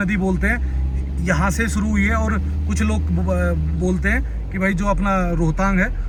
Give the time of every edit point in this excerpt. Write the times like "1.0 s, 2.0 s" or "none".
none